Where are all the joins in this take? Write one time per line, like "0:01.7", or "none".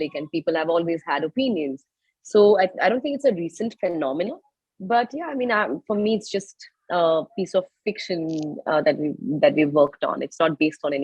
none

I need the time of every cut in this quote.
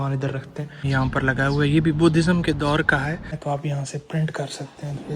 0:00.9
0:03.4

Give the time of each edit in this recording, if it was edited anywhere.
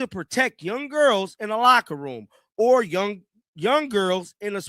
none

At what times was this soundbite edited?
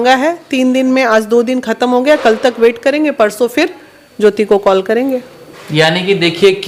none

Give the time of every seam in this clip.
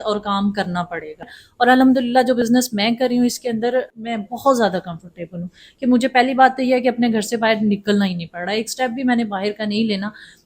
0:01.4
0:04.0

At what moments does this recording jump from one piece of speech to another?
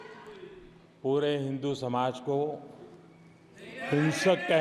none

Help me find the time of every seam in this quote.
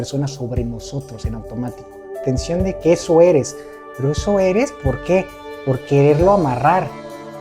0:02.2

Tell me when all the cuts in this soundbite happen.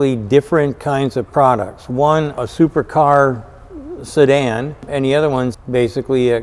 0:02.4
0:05.1

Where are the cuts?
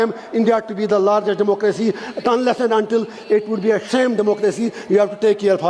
none

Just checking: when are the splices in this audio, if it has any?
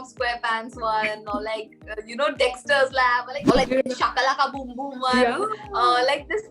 0:03.3

